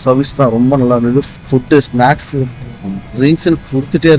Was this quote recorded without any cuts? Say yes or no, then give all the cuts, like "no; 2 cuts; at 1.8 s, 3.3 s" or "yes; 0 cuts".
no; 1 cut; at 1.3 s